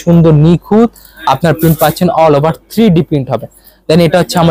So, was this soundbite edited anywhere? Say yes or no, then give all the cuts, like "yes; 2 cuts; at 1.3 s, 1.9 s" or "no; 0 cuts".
no; 0 cuts